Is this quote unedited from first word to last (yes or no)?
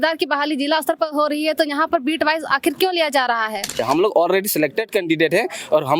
no